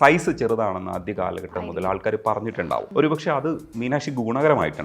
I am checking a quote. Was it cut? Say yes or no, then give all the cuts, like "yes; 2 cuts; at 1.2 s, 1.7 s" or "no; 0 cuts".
yes; 1 cut; at 2.9 s